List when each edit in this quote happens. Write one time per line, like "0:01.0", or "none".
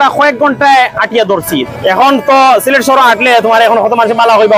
0:01.7